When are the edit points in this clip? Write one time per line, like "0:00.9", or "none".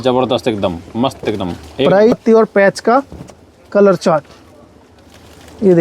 0:02.1